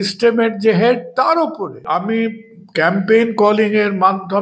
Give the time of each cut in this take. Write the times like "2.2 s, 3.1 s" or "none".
1.8 s